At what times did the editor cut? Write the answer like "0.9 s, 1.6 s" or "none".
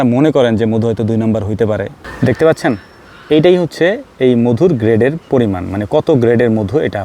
2.0 s

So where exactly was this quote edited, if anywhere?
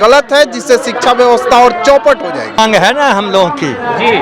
2.6 s

